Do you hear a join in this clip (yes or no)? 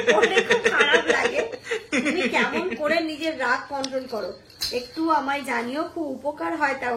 no